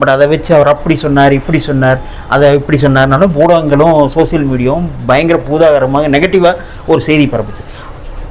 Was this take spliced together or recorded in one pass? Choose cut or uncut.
uncut